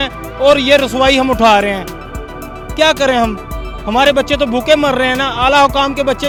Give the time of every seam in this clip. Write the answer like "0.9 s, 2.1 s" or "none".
none